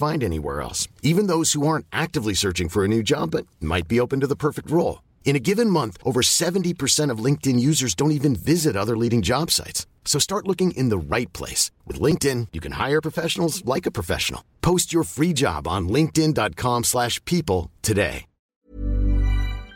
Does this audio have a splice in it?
yes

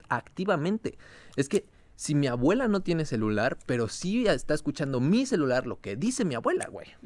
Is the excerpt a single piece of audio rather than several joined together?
yes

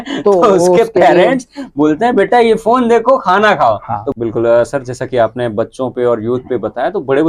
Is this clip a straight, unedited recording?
no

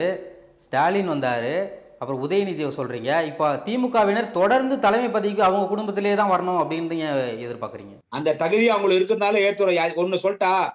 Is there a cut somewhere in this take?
no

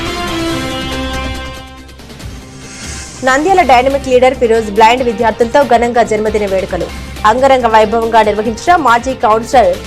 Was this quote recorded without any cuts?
no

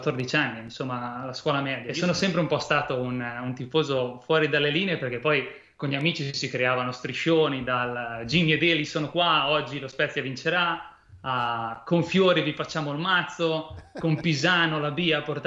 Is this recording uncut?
no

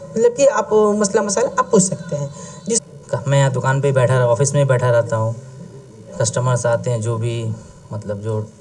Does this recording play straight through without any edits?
no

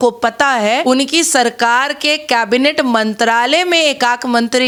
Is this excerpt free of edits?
yes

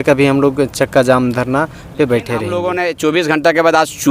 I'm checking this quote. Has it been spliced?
yes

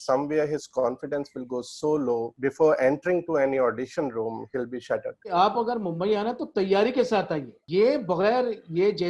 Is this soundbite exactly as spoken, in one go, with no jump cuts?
no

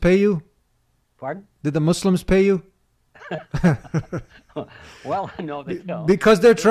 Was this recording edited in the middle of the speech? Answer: no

